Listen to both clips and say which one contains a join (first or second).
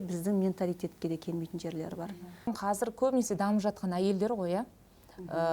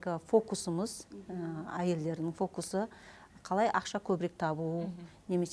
first